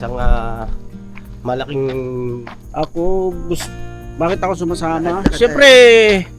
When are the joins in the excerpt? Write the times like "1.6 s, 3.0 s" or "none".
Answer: 2.5 s